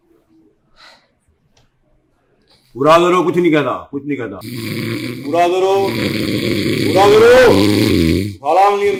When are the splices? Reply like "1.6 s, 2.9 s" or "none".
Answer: none

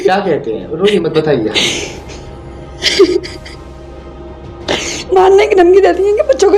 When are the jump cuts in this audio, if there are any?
none

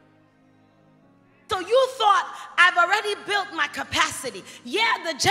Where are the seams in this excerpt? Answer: 1.5 s

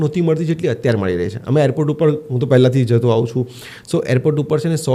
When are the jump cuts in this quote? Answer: none

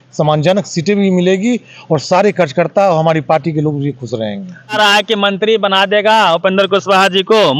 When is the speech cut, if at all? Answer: 4.7 s

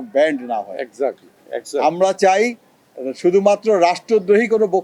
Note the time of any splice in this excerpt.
none

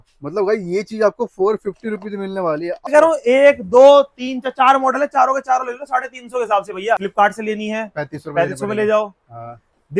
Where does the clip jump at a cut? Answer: 2.9 s, 7.0 s

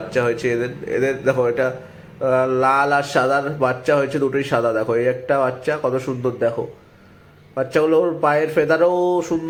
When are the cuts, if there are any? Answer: none

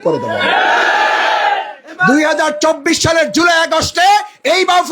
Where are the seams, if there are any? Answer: 1.9 s

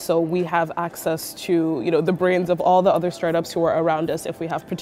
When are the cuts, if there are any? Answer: none

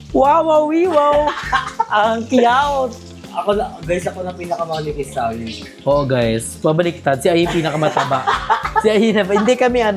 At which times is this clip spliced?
none

